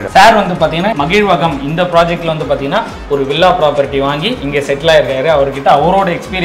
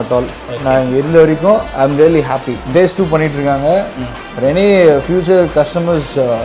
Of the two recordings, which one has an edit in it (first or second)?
first